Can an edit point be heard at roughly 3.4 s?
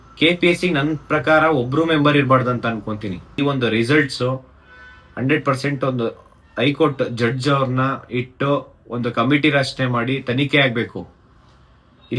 yes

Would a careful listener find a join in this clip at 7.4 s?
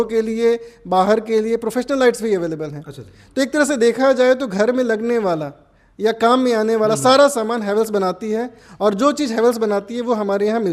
no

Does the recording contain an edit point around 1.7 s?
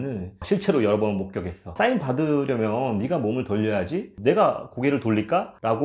yes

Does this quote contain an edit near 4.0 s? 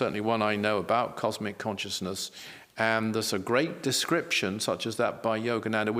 no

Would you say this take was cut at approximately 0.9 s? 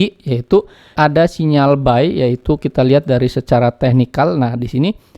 yes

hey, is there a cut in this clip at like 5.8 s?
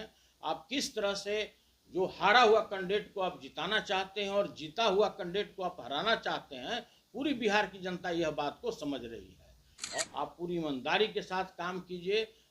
no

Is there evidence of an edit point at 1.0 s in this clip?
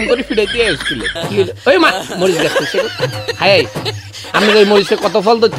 yes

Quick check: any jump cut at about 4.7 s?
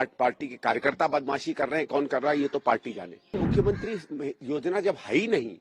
no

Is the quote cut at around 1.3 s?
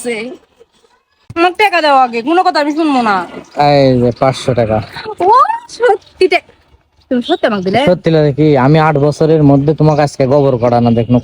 yes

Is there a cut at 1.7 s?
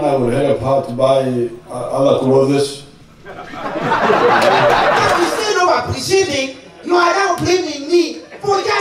yes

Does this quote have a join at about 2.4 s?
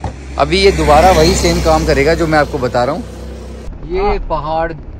no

